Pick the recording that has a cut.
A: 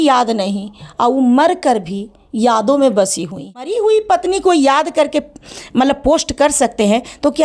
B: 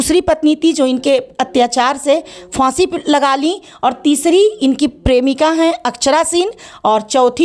A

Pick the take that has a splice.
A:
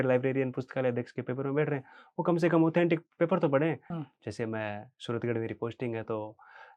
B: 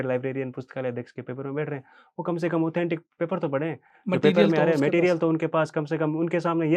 A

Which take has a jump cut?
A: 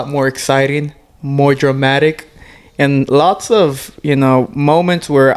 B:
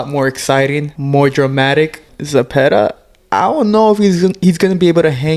B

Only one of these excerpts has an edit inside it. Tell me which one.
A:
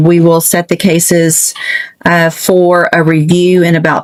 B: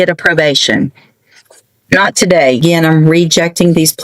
B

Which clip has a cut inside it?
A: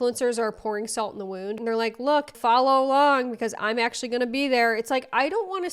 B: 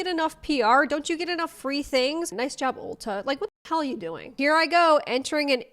B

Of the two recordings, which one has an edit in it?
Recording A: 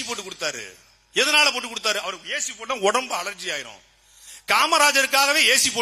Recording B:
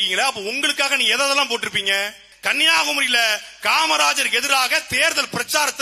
B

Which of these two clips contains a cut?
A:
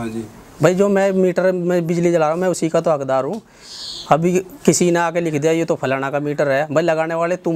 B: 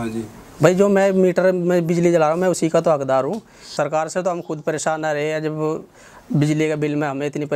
B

